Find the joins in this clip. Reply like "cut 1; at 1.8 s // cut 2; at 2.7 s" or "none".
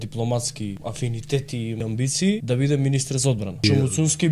cut 1; at 0.8 s // cut 2; at 1.9 s // cut 3; at 3.6 s